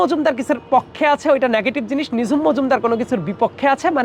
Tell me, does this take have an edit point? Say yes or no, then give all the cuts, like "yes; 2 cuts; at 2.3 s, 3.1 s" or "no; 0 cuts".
no; 0 cuts